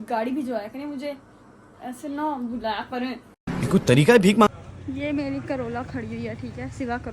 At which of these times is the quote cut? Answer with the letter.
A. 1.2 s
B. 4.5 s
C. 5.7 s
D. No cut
B